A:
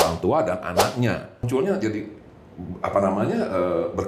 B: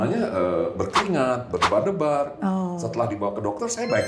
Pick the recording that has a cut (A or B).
A